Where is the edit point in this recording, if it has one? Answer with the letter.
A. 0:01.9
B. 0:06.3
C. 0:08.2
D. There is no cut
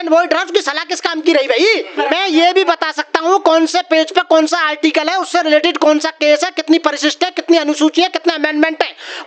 A